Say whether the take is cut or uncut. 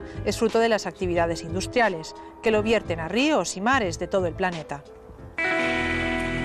uncut